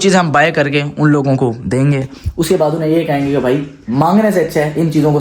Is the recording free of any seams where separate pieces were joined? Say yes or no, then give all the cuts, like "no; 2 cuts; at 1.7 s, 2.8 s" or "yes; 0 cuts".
yes; 0 cuts